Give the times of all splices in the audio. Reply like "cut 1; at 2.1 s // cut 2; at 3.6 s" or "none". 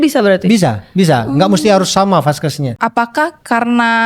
cut 1; at 2.7 s